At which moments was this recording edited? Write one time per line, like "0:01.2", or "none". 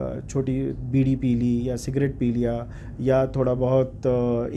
none